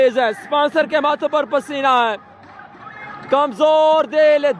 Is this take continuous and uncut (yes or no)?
yes